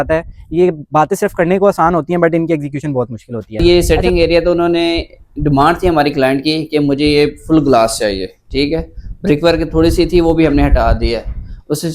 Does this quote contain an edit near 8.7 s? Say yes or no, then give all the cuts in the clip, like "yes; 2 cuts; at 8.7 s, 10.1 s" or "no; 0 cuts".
no; 1 cut; at 3.6 s